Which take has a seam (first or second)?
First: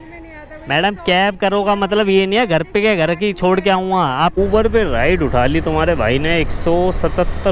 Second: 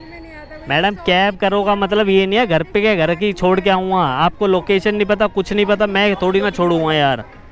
first